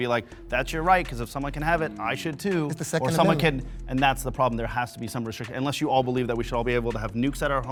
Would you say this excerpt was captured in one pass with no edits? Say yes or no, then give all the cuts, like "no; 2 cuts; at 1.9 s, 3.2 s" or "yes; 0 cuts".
yes; 0 cuts